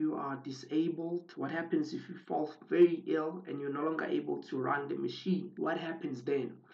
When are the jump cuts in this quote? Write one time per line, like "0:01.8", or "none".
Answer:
0:05.5